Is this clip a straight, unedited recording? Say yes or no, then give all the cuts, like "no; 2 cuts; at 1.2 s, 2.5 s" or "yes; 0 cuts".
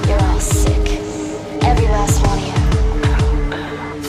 yes; 0 cuts